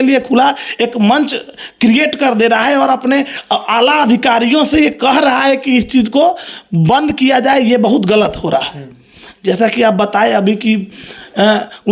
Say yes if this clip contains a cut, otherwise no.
no